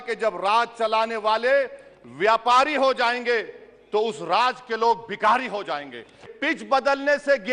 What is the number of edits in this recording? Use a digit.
1